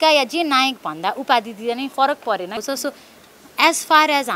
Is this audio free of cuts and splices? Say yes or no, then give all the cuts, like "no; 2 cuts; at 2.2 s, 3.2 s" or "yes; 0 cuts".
no; 1 cut; at 2.6 s